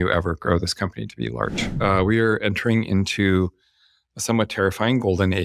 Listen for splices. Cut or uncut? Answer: cut